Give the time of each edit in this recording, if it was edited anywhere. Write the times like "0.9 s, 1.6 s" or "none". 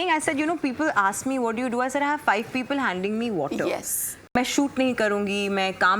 4.3 s